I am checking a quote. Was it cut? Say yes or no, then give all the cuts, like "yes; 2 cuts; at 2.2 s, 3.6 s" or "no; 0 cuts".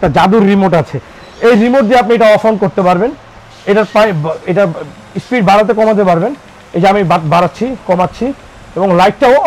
no; 0 cuts